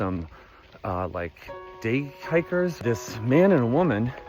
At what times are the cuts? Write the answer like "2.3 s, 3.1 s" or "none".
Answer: 2.7 s